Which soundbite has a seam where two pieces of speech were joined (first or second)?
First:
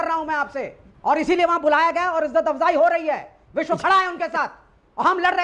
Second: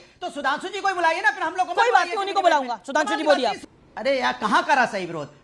second